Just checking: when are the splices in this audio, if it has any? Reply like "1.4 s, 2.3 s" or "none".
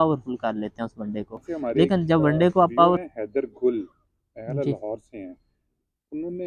3.0 s